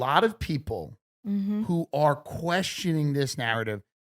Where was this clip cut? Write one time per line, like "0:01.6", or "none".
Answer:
0:01.1